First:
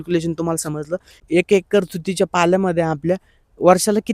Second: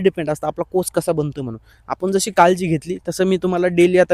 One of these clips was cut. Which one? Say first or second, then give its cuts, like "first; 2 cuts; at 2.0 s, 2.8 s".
first; 1 cut; at 1.2 s